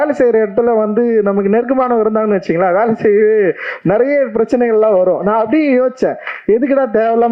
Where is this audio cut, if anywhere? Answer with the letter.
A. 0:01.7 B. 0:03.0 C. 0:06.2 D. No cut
D